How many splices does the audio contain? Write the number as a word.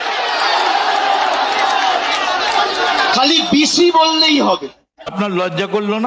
one